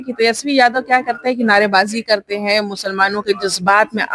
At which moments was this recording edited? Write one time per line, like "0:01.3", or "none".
none